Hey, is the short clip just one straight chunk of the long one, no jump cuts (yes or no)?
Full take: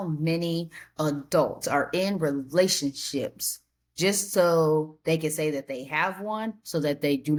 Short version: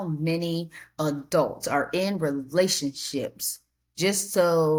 yes